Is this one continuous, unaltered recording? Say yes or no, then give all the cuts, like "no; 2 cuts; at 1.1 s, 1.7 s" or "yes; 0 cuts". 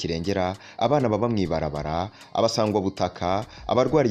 yes; 0 cuts